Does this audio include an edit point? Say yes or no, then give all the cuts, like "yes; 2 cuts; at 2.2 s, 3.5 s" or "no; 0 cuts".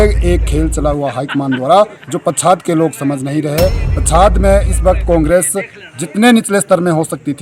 no; 0 cuts